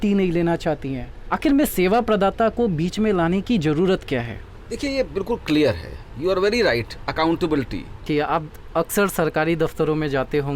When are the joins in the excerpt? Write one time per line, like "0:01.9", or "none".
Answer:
0:08.0